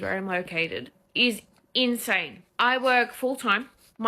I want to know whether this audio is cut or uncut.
uncut